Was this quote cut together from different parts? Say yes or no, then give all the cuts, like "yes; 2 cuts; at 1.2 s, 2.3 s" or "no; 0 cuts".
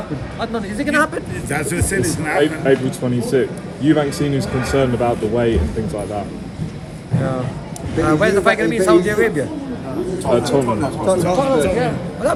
no; 0 cuts